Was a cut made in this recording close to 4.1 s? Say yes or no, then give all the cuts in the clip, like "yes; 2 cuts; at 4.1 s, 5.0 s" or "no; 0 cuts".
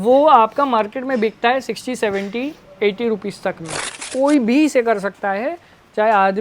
yes; 1 cut; at 4.1 s